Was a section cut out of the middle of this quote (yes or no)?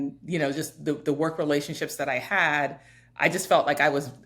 no